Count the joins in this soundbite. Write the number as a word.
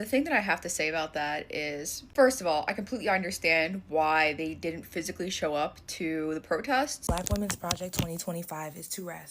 one